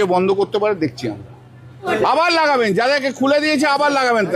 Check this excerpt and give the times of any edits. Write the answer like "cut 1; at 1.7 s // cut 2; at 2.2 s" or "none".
cut 1; at 1.9 s